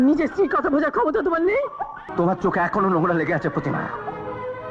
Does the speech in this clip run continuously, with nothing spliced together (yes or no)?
no